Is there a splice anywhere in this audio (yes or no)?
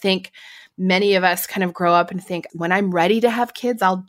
yes